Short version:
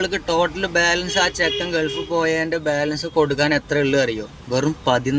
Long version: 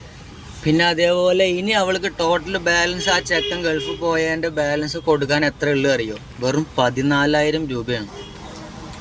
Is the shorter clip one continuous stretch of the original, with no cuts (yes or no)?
yes